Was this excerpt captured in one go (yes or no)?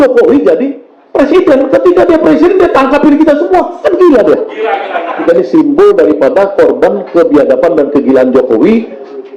no